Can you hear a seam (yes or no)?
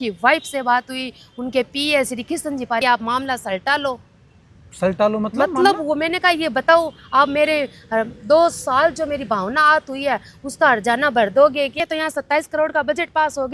yes